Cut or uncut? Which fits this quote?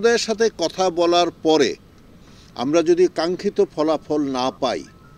uncut